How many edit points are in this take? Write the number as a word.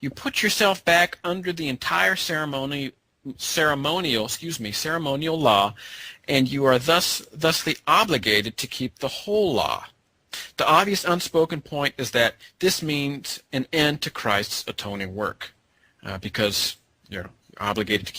one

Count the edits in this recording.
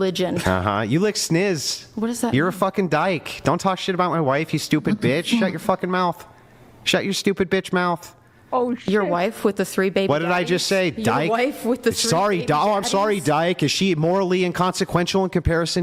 zero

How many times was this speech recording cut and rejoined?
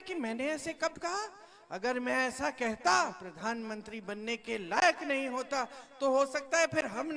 one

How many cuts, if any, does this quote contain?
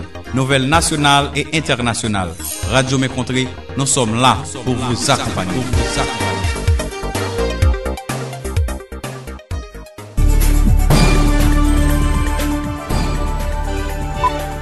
one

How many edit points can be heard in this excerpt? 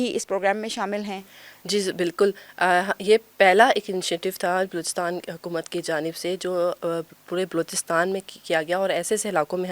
zero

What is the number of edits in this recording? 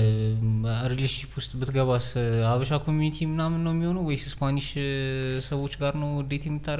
zero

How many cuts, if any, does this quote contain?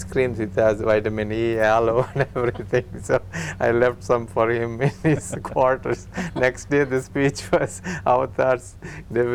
zero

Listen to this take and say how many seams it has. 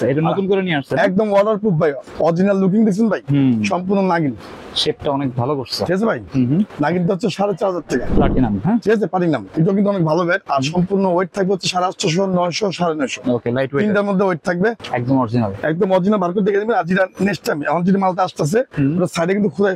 four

